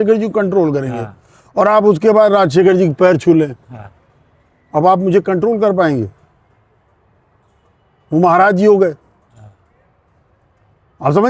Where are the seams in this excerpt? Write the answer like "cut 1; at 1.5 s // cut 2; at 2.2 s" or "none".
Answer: none